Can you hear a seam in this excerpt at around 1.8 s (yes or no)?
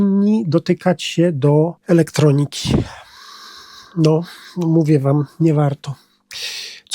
yes